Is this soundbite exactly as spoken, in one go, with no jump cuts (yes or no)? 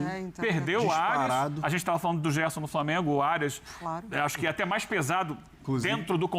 yes